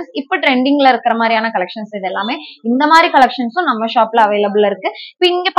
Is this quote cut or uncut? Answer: uncut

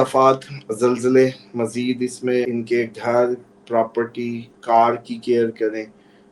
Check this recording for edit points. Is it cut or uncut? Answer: cut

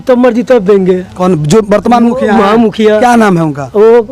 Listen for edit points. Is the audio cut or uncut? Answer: uncut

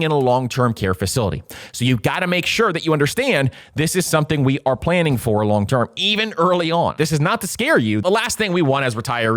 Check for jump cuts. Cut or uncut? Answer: cut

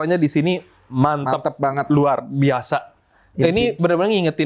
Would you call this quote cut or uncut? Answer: uncut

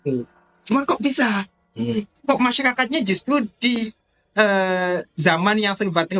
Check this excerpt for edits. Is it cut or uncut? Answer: uncut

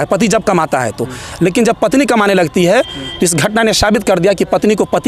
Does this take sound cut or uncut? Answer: uncut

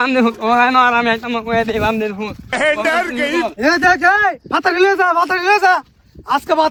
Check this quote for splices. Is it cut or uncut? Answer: uncut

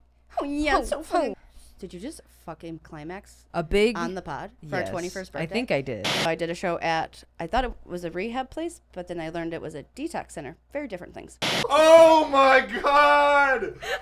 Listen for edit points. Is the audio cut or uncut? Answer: cut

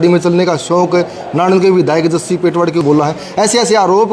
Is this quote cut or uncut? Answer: cut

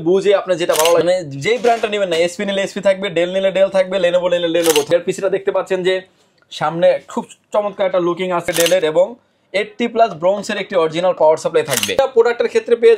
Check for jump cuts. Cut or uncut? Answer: cut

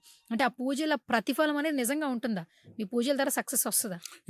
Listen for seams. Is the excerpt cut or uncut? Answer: uncut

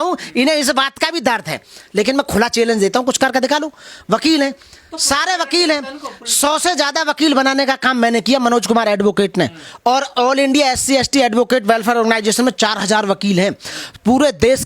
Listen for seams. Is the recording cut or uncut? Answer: uncut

